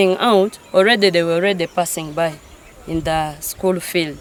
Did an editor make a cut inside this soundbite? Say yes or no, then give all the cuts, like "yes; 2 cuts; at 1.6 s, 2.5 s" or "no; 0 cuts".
no; 0 cuts